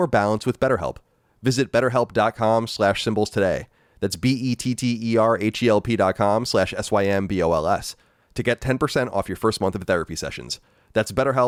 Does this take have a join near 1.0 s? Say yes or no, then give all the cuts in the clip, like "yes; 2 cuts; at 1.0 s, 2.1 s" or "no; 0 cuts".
no; 0 cuts